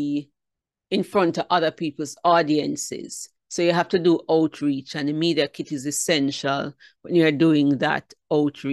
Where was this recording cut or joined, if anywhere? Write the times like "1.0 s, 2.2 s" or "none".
none

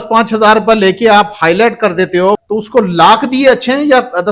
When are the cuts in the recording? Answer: 2.4 s

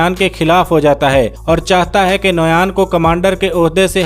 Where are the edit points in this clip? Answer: none

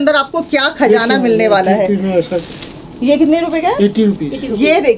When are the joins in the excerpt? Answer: none

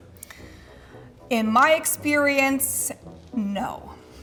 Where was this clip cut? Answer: none

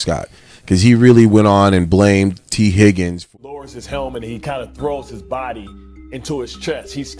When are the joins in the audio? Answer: 3.2 s

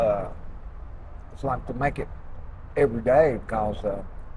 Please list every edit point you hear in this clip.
none

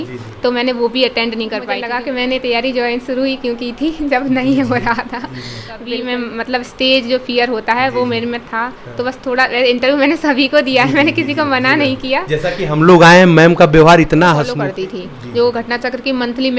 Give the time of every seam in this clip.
1.8 s, 5.9 s, 14.5 s

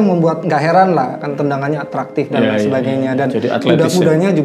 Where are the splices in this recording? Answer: none

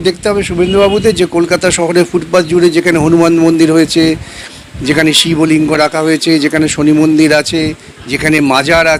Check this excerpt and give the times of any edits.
none

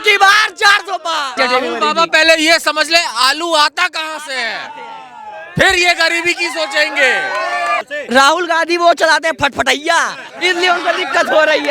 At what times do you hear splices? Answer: 1.3 s, 7.8 s

